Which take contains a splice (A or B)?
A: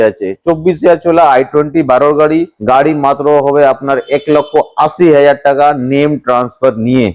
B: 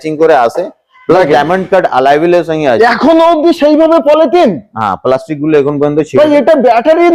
A